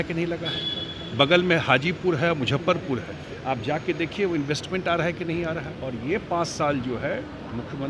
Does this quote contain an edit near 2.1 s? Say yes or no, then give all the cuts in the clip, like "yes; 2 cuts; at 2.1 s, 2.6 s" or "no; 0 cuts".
no; 1 cut; at 5.7 s